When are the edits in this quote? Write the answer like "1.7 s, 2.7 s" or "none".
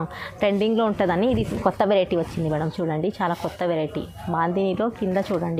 none